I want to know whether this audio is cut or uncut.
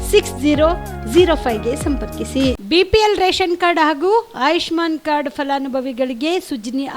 cut